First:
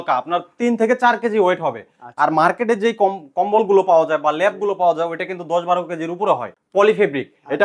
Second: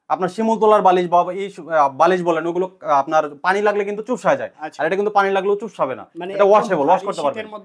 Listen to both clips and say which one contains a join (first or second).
first